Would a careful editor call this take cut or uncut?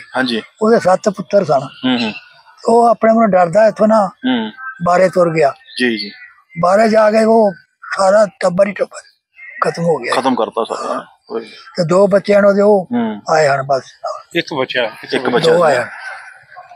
uncut